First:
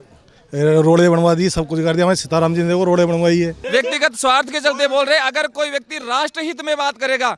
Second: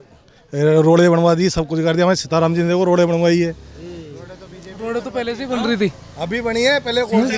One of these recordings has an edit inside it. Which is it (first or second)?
first